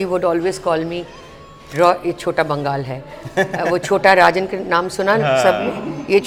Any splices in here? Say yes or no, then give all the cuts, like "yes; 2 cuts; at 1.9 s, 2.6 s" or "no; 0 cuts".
no; 0 cuts